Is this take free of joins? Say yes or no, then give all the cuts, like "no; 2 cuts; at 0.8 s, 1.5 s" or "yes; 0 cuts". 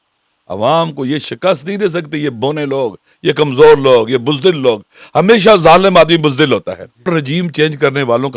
no; 1 cut; at 7.1 s